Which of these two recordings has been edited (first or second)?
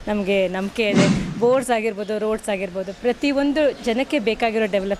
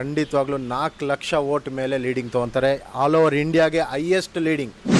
first